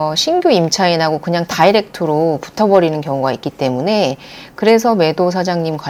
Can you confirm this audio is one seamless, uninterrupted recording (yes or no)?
yes